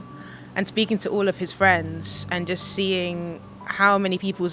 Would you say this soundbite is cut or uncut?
uncut